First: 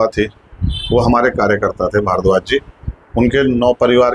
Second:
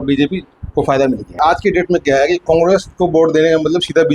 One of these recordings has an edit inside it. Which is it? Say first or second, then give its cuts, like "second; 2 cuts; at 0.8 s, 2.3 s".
second; 1 cut; at 1.4 s